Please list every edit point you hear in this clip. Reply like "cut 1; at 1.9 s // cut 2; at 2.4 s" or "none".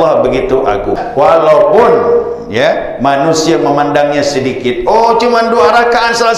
cut 1; at 1.0 s